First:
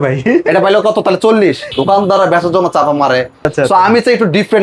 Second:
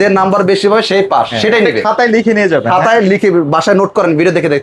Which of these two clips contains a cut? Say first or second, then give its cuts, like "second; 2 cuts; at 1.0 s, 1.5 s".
first; 2 cuts; at 1.7 s, 3.5 s